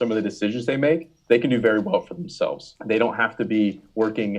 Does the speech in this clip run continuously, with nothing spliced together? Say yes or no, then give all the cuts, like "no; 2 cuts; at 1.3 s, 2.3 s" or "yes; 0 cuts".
no; 1 cut; at 2.7 s